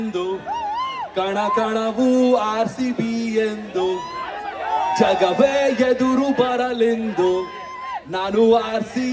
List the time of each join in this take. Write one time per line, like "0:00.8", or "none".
none